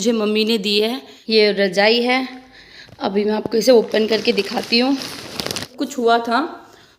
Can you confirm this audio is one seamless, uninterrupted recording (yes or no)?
no